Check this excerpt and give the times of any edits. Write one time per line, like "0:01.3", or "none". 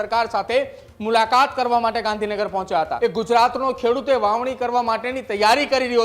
0:02.9

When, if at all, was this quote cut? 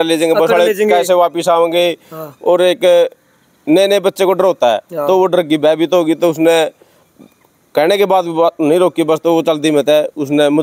none

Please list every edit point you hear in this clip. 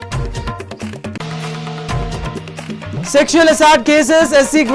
0:00.9

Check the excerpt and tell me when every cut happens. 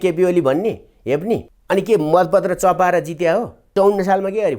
0:01.5
0:03.7

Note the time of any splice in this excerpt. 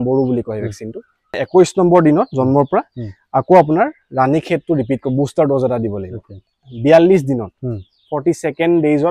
0:01.3
0:06.5

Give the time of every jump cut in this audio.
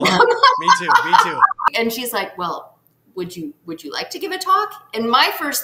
0:01.7

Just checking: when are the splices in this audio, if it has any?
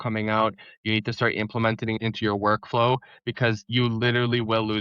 0:02.0
0:03.7

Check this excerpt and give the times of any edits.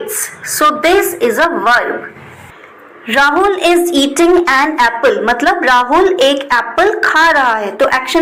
none

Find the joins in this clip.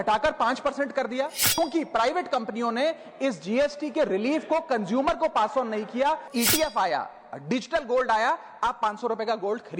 0:01.6
0:06.2

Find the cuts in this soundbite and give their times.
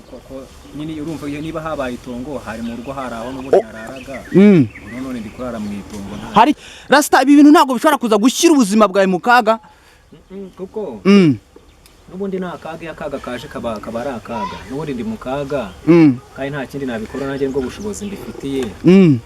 0:06.7

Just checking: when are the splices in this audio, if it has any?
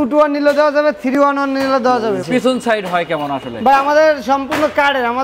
0:02.2

